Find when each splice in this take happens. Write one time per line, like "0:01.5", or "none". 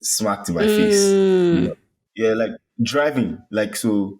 0:02.2

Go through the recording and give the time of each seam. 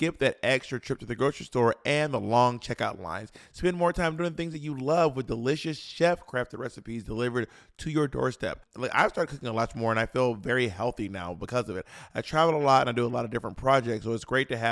0:08.6
0:11.9

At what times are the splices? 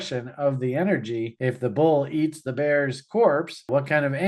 none

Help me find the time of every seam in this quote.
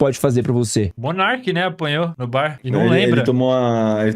0:01.0
0:02.4

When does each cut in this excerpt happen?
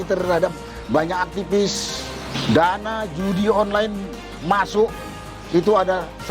0:02.3

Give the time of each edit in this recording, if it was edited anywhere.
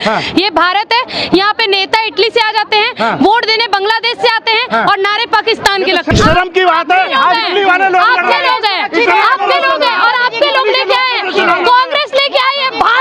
0:06.1

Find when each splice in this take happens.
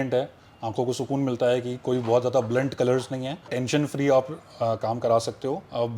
0:03.5

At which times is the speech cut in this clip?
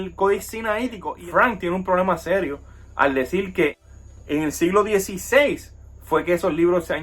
0:01.1
0:03.8

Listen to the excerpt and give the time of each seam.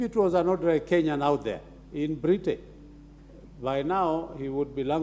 none

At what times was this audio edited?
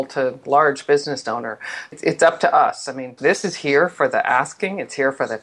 0:01.9
0:03.2

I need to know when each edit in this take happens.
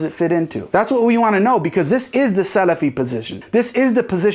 0:03.3

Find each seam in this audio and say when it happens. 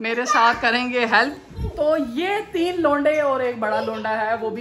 none

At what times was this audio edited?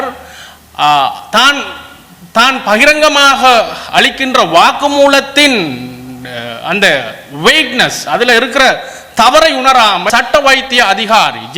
0:10.1

